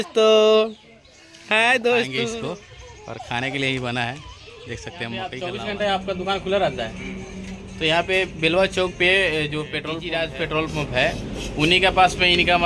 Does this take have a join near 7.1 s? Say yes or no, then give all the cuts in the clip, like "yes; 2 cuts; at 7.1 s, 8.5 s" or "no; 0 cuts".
no; 3 cuts; at 2.3 s, 5.4 s, 9.9 s